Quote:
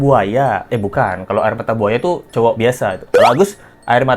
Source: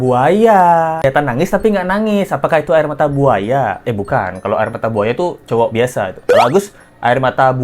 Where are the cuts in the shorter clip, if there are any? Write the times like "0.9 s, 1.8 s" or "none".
none